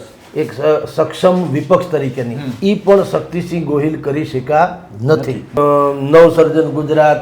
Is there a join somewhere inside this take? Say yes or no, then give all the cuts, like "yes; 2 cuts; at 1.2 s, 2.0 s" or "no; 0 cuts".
yes; 1 cut; at 5.5 s